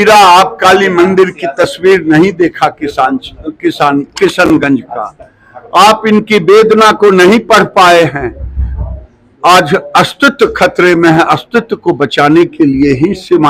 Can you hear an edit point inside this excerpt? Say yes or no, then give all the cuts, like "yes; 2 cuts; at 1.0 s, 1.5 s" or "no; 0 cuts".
no; 0 cuts